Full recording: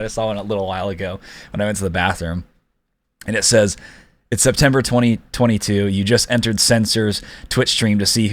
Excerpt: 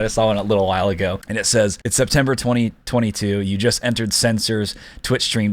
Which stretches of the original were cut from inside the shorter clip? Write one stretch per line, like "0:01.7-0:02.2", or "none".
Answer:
0:01.4-0:03.8